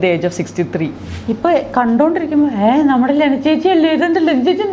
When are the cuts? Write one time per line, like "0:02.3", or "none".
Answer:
0:01.1

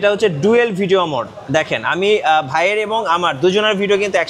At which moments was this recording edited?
none

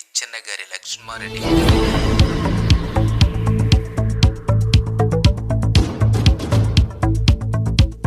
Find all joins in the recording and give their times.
none

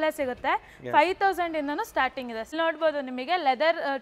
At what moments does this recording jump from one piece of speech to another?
0:02.5

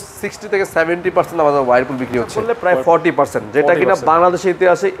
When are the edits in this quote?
0:02.4

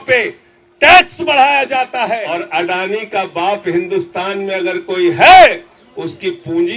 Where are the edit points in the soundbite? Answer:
0:02.2

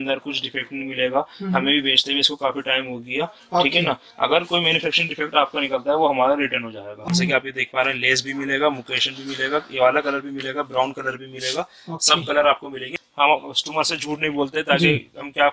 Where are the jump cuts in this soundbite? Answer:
0:06.9
0:13.0

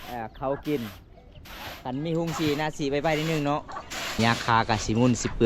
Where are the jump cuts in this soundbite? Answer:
0:04.2

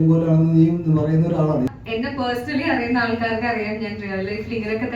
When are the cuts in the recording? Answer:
0:01.7

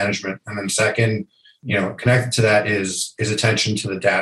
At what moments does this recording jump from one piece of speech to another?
none

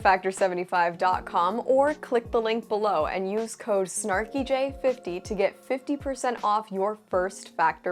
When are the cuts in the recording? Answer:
none

